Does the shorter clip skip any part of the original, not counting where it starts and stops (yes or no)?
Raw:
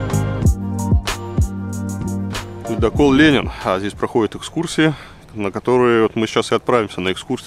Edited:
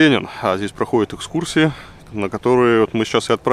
no